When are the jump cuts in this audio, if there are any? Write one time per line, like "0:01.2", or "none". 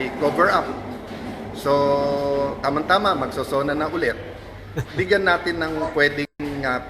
none